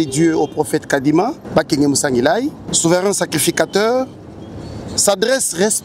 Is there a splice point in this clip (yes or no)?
yes